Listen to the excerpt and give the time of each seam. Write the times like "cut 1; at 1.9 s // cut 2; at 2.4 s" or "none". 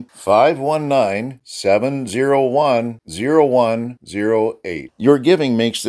none